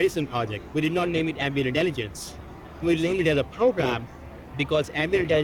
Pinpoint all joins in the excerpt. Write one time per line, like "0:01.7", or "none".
0:02.8